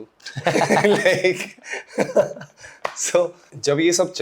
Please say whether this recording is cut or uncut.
uncut